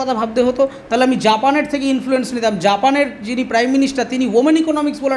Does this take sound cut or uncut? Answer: uncut